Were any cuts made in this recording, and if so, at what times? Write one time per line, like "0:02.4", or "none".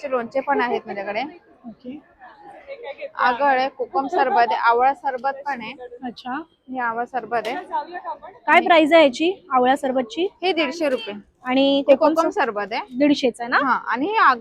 none